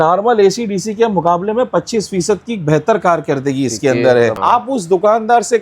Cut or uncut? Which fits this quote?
cut